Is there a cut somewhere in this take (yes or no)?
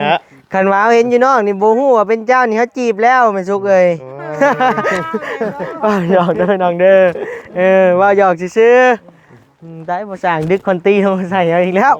no